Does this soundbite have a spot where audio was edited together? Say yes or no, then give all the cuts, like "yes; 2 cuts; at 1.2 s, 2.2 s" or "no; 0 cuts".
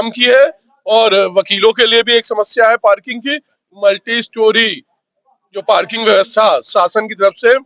no; 0 cuts